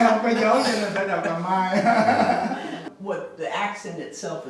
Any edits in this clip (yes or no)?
yes